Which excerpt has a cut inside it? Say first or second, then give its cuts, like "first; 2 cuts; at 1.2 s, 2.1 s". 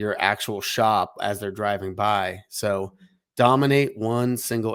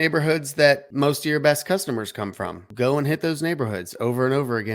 second; 2 cuts; at 0.9 s, 2.7 s